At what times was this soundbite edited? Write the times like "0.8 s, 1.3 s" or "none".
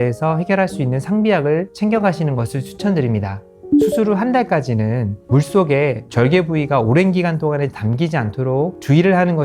3.6 s